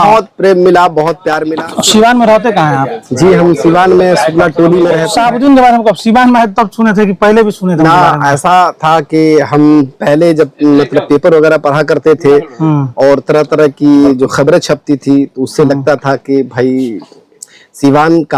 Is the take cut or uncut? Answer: cut